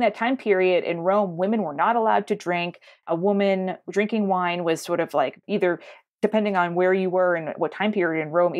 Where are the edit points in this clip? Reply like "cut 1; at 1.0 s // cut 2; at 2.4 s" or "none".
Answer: none